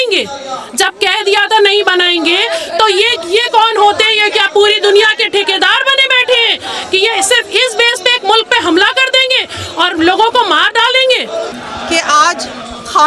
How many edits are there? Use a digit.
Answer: 1